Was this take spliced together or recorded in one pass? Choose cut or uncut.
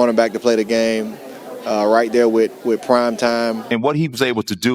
cut